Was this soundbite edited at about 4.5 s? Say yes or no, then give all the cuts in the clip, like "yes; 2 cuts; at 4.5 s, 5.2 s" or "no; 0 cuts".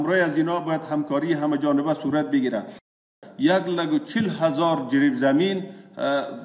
no; 1 cut; at 3.0 s